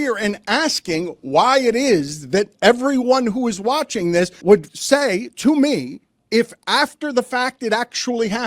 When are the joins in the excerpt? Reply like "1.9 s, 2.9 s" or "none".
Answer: 4.6 s